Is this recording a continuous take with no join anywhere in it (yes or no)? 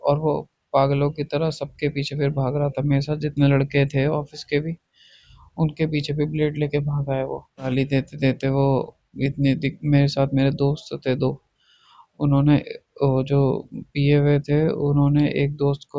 no